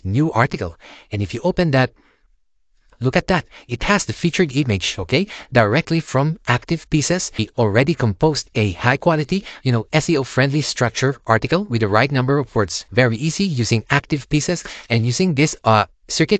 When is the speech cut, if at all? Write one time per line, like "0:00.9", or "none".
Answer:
0:07.5
0:12.8